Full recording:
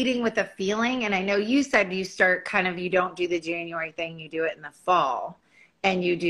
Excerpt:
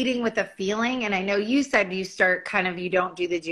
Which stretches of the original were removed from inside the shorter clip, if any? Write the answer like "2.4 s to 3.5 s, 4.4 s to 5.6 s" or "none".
none

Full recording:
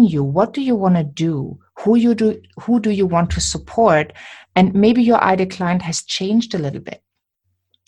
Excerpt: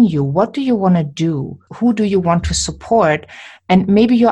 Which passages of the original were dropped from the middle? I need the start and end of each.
1.6 s to 2.5 s

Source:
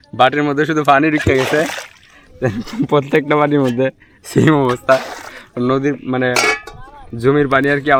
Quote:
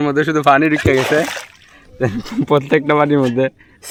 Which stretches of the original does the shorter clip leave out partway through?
none

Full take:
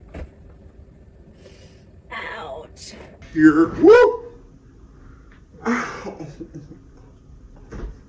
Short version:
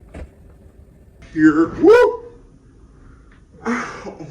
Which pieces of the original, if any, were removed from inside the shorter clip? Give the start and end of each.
1.2 s to 3.2 s

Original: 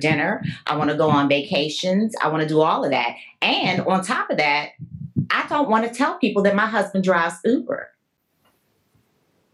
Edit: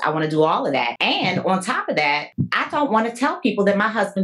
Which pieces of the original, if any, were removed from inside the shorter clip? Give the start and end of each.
3.1 s to 3.4 s, 4.7 s to 5.1 s

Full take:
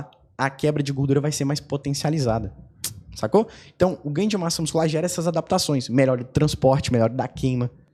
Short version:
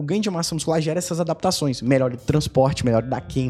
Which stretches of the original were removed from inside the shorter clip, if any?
none

